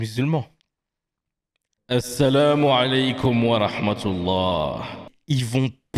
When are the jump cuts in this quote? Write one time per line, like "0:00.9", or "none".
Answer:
0:05.1